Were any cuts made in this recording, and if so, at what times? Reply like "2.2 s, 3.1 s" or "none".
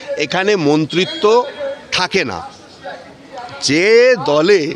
none